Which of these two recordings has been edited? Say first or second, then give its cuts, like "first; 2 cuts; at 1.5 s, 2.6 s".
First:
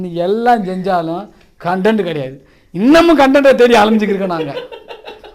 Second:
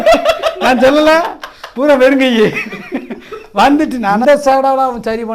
second; 1 cut; at 4.2 s